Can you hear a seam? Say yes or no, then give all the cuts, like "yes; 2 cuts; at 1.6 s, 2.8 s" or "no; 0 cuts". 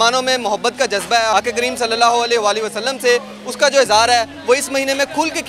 yes; 1 cut; at 1.3 s